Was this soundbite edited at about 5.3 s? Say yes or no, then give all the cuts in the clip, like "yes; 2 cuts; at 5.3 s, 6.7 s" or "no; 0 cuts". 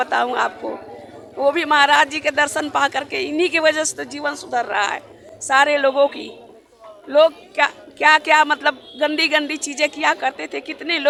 no; 0 cuts